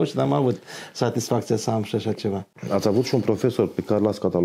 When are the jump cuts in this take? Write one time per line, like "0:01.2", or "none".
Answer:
none